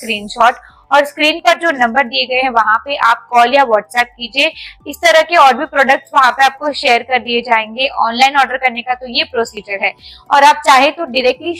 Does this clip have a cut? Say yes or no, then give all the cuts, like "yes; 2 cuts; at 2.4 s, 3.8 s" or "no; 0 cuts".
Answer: no; 0 cuts